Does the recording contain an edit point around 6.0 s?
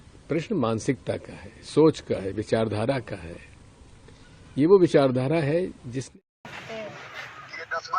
yes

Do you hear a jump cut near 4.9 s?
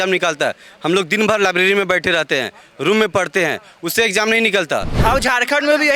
yes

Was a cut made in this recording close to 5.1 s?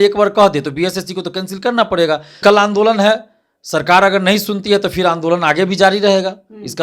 no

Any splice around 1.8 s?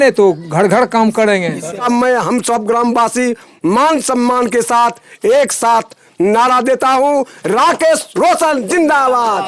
yes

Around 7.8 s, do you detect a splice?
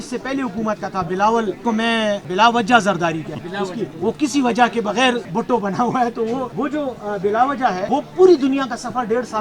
yes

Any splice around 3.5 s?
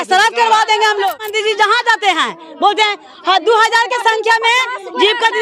no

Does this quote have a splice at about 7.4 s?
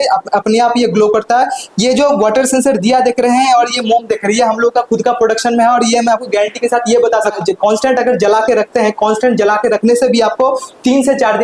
yes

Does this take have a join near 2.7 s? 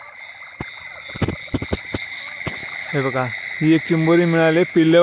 yes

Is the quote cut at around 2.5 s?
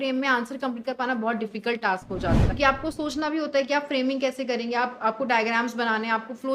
yes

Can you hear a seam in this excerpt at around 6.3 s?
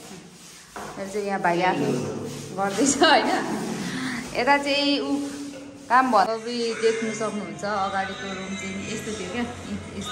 yes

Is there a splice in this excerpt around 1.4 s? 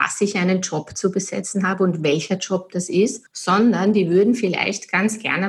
no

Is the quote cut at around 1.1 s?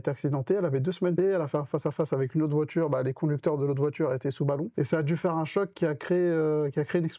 yes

